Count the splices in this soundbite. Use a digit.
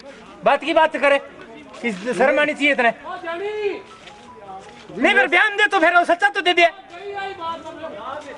0